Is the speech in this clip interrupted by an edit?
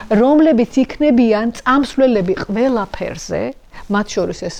no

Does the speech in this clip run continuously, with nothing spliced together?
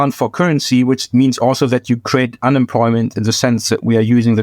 yes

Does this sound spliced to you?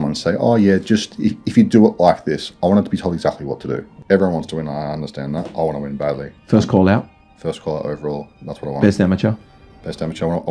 yes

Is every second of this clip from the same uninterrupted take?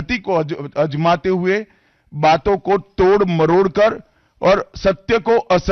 yes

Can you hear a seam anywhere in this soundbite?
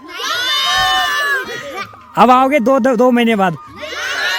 no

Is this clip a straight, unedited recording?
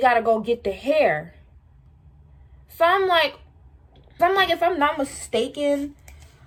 yes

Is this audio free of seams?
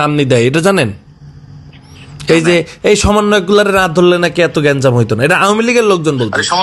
yes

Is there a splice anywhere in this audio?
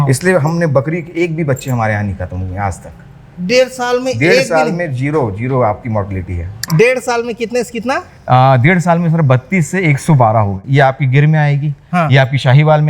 yes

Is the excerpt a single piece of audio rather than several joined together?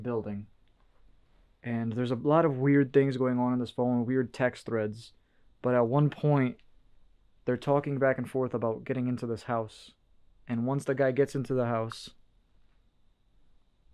yes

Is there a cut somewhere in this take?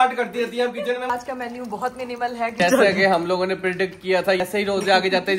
yes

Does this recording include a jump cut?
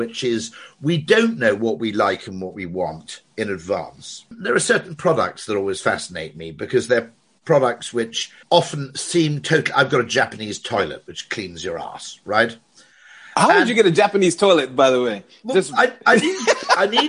yes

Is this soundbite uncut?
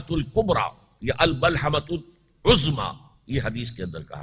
yes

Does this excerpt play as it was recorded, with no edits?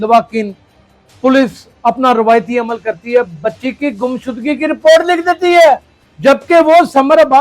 yes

